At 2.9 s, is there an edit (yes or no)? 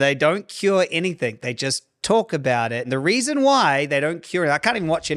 yes